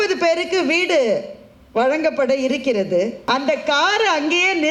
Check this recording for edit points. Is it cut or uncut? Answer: cut